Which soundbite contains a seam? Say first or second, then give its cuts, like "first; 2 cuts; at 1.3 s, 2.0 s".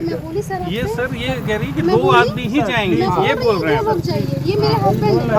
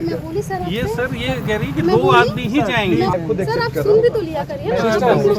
second; 1 cut; at 3.1 s